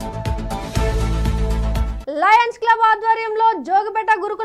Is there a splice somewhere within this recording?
yes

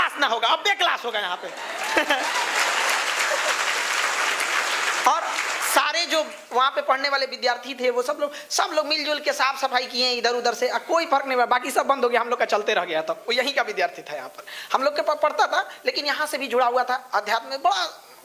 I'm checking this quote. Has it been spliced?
no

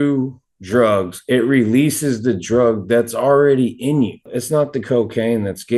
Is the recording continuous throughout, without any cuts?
yes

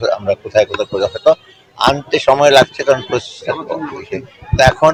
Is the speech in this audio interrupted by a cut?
no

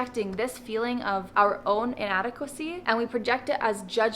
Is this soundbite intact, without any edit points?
no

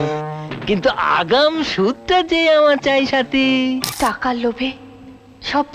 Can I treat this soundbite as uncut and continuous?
no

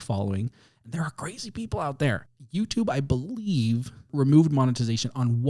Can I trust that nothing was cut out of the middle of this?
no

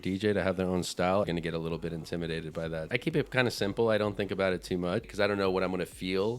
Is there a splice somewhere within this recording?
yes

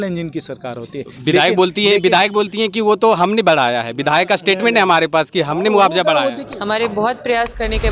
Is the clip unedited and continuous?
yes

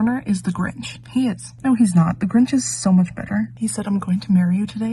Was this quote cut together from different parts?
no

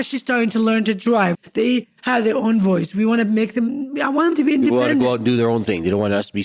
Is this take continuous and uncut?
no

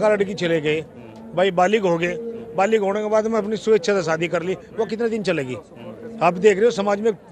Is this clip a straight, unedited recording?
yes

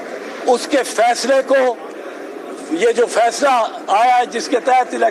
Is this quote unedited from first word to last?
yes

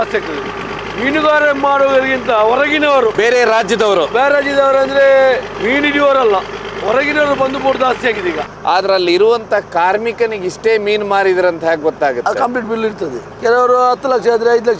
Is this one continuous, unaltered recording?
no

